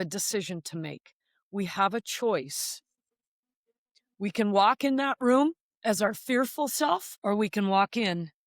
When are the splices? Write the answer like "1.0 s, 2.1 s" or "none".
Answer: 7.1 s